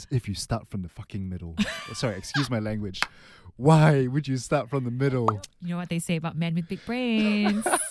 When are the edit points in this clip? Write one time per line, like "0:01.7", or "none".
0:05.3

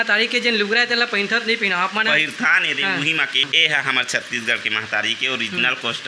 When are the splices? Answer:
0:03.4

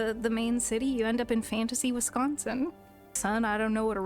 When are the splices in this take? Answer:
0:03.1

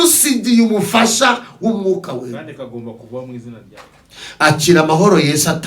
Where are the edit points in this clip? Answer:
0:03.7

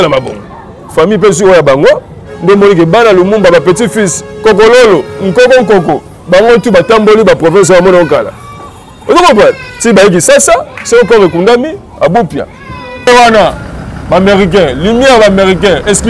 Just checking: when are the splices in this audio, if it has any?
0:13.1

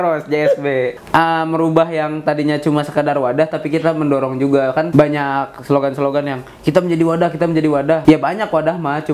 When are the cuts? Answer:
0:00.9
0:04.9
0:08.0

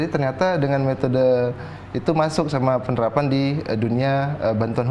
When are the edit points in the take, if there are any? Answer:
none

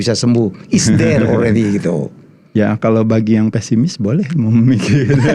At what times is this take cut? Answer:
none

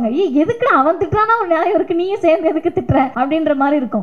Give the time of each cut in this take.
0:03.1

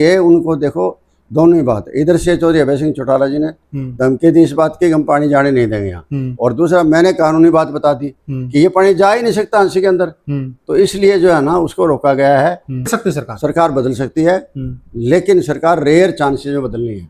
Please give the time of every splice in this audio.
0:12.9

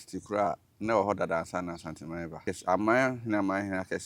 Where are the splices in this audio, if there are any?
0:02.5

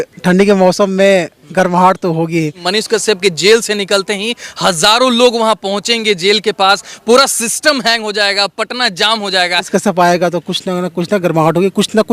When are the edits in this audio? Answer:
0:02.6
0:09.7

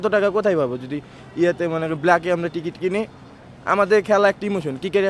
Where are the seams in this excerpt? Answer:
none

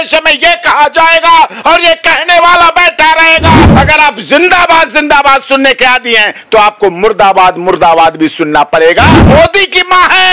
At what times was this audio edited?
0:03.7
0:09.2

